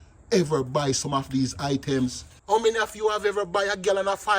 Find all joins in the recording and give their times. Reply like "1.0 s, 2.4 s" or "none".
2.3 s

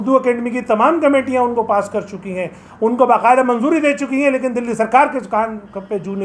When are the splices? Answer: none

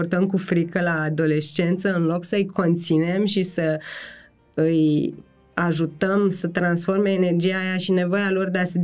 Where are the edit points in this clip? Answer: none

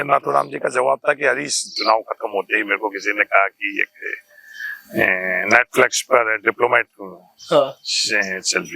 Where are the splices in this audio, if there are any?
1.7 s

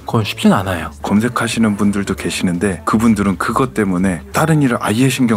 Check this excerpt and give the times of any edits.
1.0 s

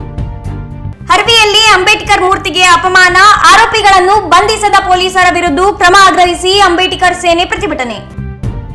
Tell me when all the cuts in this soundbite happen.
none

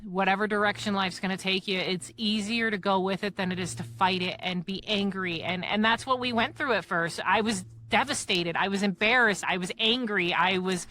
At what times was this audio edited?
none

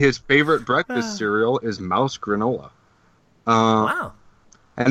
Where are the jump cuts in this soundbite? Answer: none

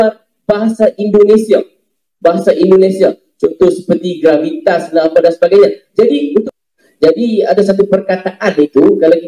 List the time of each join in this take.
6.4 s

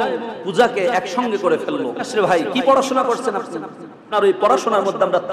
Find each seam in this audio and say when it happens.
2.1 s, 4.1 s

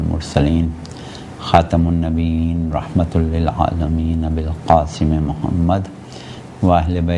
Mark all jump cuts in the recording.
5.4 s

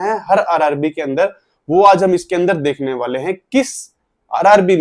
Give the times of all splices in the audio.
none

